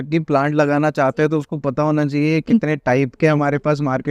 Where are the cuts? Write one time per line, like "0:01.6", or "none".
none